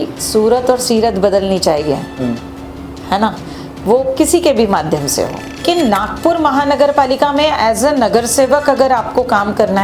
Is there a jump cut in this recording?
yes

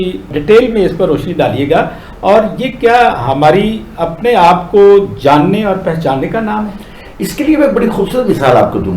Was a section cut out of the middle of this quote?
no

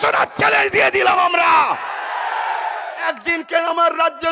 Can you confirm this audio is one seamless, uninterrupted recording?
no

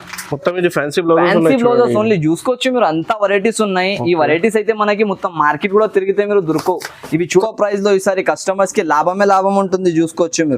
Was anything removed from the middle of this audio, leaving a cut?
yes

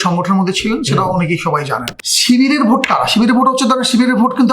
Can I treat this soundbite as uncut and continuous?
no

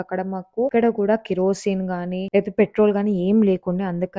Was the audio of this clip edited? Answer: no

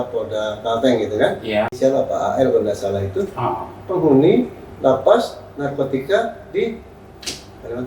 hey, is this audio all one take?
no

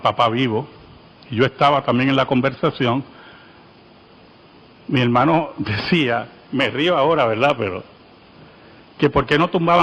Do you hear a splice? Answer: no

